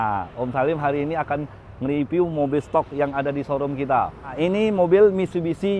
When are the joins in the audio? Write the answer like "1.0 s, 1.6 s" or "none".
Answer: 4.3 s